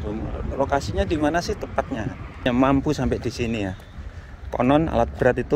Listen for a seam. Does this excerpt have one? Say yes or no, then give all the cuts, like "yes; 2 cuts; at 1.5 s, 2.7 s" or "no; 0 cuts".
yes; 1 cut; at 2.4 s